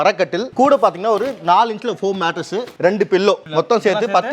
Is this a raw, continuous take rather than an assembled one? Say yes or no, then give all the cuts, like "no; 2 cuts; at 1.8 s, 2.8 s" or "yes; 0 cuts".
no; 2 cuts; at 2.7 s, 3.4 s